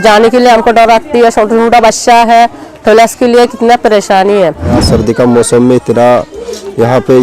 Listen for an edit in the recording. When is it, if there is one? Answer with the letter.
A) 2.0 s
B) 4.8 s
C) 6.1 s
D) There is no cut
B